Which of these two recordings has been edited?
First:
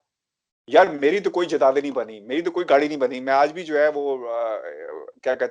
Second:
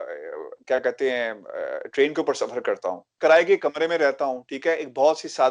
second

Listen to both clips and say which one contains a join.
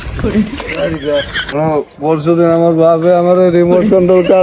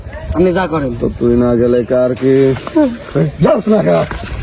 first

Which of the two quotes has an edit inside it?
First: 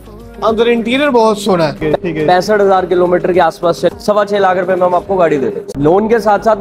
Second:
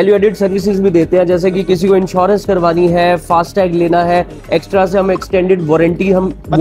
first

